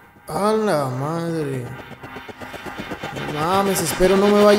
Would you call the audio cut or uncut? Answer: uncut